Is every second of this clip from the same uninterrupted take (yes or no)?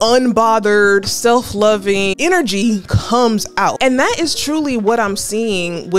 no